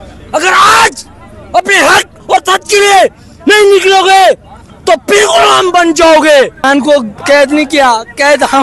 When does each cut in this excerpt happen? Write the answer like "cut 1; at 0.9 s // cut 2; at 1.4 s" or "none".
cut 1; at 6.6 s